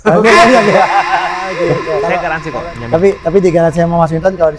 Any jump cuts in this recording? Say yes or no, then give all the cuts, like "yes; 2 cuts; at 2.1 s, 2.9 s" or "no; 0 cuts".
yes; 1 cut; at 2.2 s